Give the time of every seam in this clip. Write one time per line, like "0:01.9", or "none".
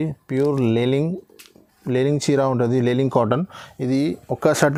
none